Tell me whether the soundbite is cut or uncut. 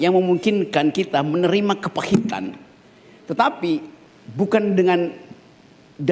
uncut